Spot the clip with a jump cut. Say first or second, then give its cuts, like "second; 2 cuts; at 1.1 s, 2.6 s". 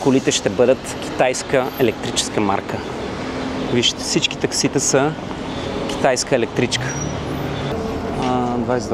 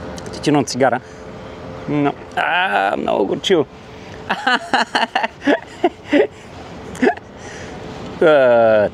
first; 1 cut; at 7.7 s